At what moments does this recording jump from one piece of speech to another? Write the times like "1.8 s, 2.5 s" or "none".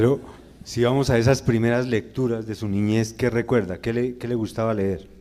none

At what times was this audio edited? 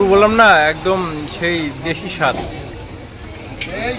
none

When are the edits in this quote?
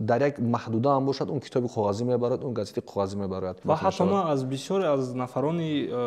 3.6 s

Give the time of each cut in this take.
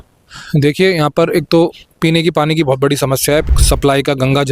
3.5 s

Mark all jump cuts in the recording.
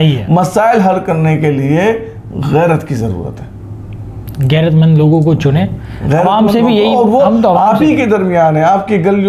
none

